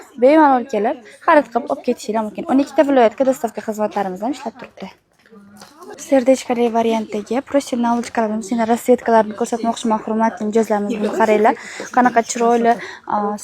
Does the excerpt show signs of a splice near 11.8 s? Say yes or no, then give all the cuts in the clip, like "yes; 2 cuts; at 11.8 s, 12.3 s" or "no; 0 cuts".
no; 1 cut; at 6.0 s